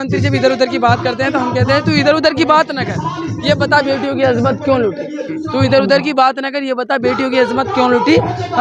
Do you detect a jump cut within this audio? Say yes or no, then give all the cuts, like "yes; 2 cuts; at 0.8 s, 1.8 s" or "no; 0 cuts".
no; 0 cuts